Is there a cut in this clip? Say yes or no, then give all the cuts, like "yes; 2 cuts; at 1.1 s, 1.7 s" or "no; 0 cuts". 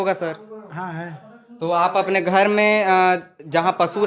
no; 0 cuts